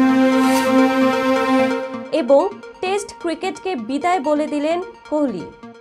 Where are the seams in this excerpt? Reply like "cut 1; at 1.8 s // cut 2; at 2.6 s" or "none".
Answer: none

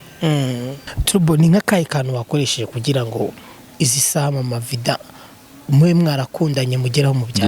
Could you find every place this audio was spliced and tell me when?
cut 1; at 1.0 s

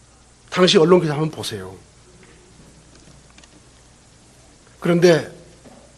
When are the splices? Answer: cut 1; at 3.6 s

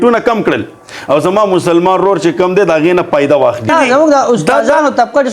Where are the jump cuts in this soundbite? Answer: cut 1; at 3.7 s

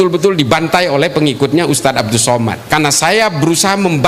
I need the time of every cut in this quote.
cut 1; at 2.6 s

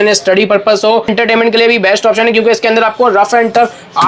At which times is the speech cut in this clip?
cut 1; at 1.1 s

